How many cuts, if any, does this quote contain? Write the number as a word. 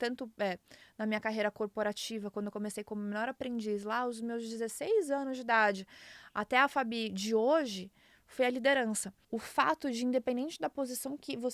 one